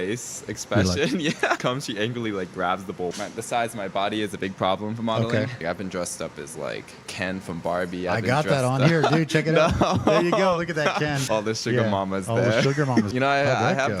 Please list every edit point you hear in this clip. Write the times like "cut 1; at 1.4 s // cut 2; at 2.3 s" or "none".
cut 1; at 1.6 s // cut 2; at 3.1 s // cut 3; at 5.6 s // cut 4; at 11.2 s // cut 5; at 13.1 s